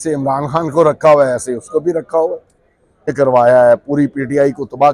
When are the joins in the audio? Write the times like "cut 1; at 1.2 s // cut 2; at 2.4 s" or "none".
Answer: cut 1; at 3.1 s